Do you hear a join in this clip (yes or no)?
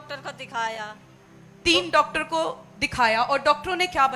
no